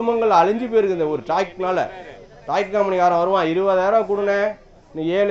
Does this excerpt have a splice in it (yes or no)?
no